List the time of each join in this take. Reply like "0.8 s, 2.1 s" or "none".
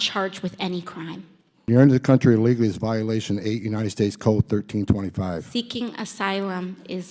1.7 s